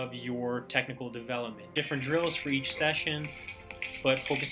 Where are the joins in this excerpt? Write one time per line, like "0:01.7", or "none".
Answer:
0:01.7